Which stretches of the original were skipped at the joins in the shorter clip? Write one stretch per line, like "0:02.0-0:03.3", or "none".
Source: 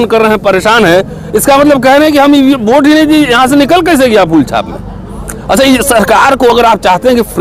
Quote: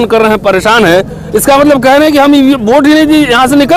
none